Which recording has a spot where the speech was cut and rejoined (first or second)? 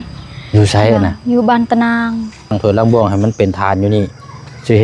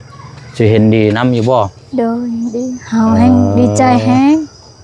first